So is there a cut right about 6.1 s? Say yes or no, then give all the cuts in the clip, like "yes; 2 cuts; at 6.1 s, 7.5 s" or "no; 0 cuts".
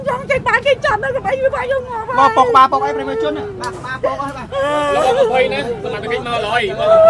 no; 0 cuts